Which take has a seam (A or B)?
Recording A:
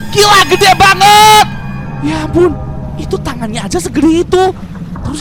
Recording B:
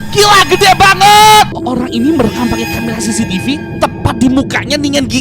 B